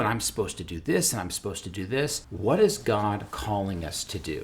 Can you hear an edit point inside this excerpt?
yes; 2 cuts; at 2.2 s, 3.3 s

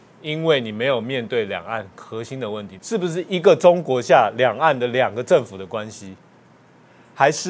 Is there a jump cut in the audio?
yes; 1 cut; at 2.7 s

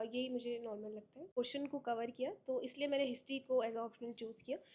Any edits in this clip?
yes; 1 cut; at 1.3 s

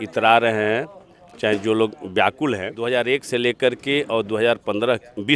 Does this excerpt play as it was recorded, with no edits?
no; 1 cut; at 2.7 s

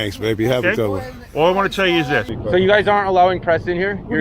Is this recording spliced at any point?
yes; 1 cut; at 2.3 s

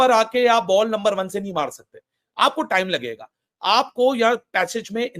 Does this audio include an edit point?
no; 0 cuts

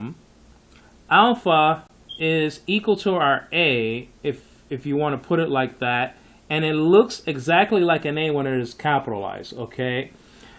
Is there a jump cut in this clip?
yes; 1 cut; at 8.4 s

